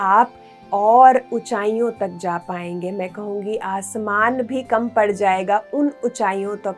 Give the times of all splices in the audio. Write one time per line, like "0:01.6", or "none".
none

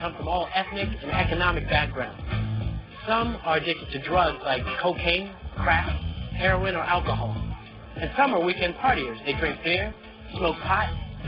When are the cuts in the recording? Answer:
0:04.5

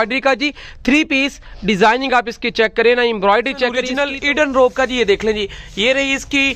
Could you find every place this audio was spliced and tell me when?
0:03.9

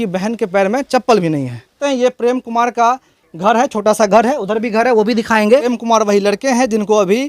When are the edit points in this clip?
0:01.7
0:05.7

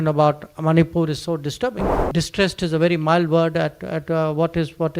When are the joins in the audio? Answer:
0:01.9

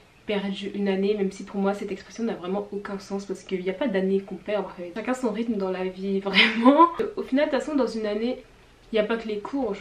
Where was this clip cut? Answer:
0:04.8
0:07.0

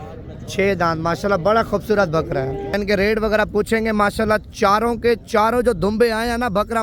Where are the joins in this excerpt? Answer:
0:02.7

